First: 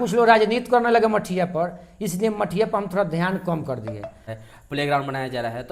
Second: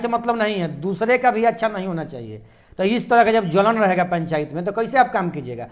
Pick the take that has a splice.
first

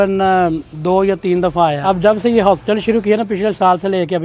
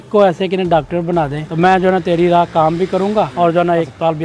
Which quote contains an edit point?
first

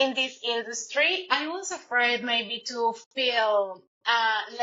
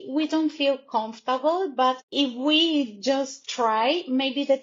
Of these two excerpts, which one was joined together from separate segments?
second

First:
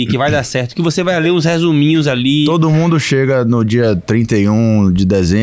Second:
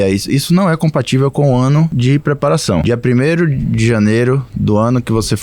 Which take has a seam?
second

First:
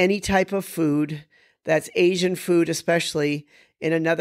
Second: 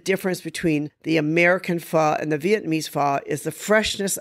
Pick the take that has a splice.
second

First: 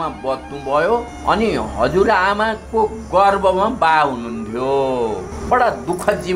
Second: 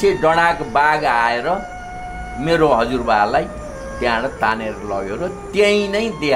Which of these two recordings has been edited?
first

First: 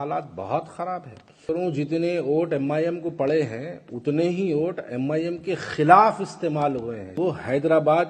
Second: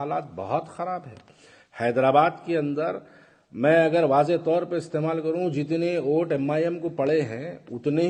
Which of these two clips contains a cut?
first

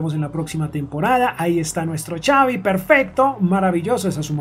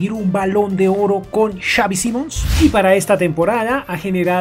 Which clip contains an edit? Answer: second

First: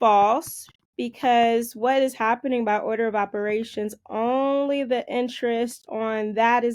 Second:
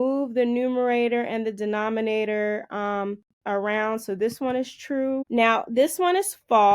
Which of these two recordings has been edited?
second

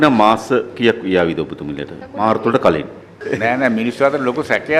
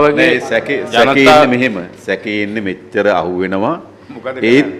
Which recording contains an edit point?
first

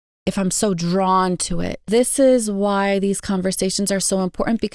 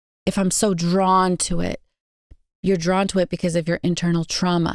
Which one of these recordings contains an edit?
first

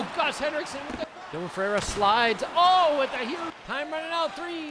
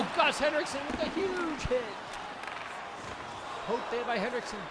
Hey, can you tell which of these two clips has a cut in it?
first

